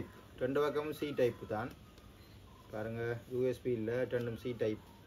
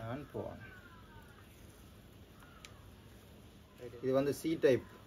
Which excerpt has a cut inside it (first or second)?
second